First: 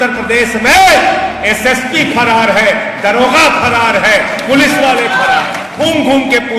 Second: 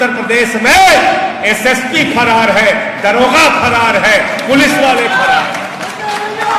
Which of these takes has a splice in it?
first; 1 cut; at 5.7 s

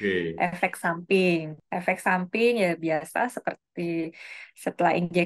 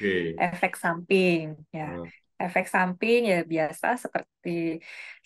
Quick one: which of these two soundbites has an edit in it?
first; 1 cut; at 1.6 s

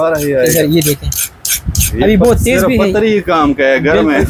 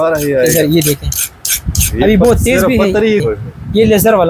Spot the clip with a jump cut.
second; 1 cut; at 3.2 s

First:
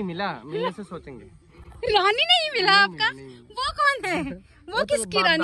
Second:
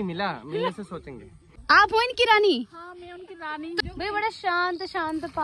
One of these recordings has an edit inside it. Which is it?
second; 2 cuts; at 1.5 s, 3.8 s

